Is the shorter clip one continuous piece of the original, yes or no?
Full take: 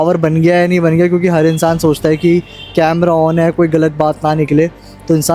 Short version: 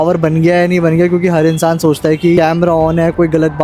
no